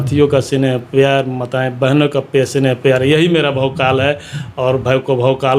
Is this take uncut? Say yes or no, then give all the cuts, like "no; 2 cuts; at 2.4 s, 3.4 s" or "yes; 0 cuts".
yes; 0 cuts